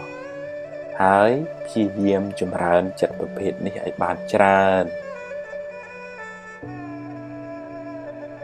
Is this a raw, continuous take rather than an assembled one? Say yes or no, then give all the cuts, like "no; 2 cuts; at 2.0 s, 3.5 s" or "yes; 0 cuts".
yes; 0 cuts